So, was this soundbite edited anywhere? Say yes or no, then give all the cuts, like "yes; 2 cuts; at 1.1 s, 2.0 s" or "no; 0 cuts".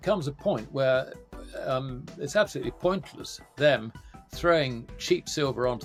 no; 0 cuts